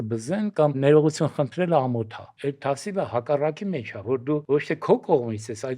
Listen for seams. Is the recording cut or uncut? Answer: cut